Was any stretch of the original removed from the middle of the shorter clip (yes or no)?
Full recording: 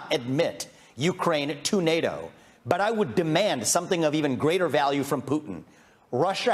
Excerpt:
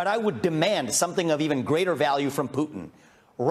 no